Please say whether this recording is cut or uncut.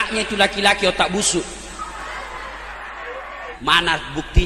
cut